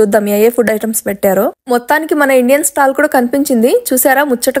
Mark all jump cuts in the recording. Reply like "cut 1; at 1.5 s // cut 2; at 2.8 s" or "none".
cut 1; at 1.6 s